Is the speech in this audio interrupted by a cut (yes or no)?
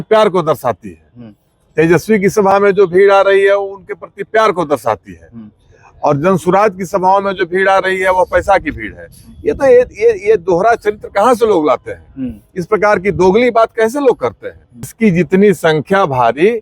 yes